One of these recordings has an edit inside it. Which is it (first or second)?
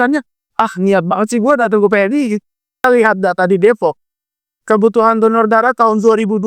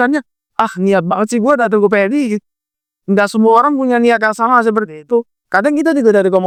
first